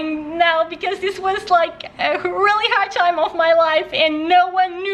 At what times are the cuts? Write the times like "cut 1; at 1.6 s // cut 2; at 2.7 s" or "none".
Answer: none